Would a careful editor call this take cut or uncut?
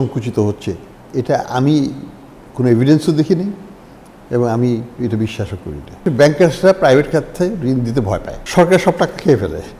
cut